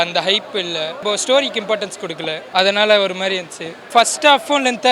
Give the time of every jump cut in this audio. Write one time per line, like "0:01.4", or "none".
0:01.0
0:02.4
0:03.9